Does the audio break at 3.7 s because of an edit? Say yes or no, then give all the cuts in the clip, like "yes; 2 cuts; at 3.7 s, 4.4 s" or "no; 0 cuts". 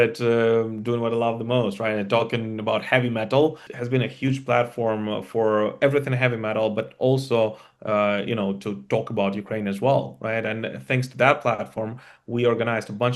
yes; 1 cut; at 3.7 s